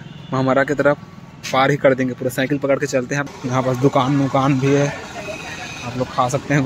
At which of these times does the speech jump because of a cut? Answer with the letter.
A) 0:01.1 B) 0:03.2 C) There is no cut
B